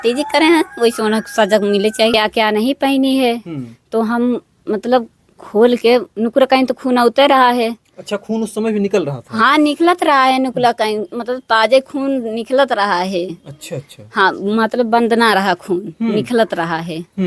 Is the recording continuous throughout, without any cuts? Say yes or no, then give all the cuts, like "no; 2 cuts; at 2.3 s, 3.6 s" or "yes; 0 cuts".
no; 1 cut; at 2.1 s